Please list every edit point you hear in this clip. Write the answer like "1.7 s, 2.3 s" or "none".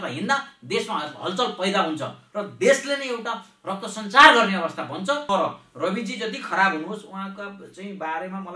5.2 s